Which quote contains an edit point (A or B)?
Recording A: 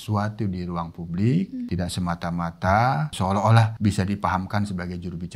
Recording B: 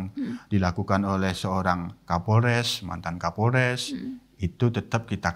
A